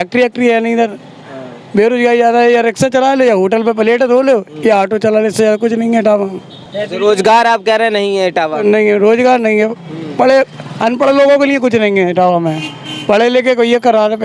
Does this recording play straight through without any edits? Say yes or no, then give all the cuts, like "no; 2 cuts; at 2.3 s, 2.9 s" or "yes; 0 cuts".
yes; 0 cuts